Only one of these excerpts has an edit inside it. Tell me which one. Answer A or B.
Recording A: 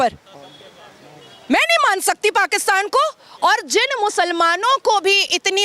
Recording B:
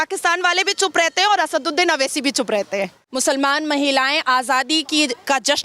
B